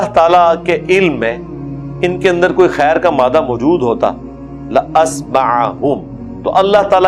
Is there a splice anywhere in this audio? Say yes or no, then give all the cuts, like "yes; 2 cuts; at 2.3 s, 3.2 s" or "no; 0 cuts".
no; 0 cuts